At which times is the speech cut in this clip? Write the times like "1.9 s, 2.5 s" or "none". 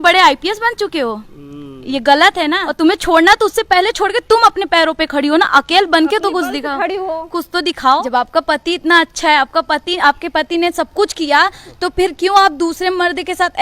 2.6 s, 8.0 s

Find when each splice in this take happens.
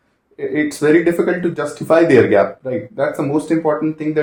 none

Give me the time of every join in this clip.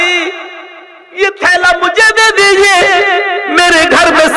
none

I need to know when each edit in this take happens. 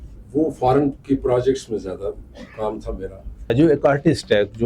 3.5 s

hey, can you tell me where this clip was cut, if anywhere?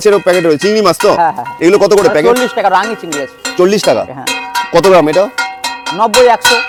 none

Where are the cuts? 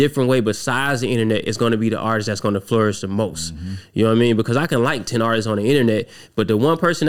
none

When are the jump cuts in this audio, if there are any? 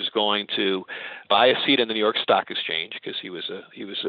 1.2 s

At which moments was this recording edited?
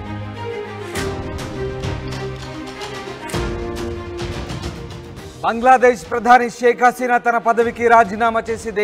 1.8 s

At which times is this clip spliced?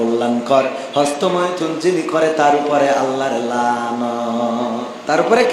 none

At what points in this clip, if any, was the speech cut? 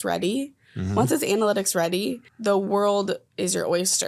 2.3 s, 3.3 s

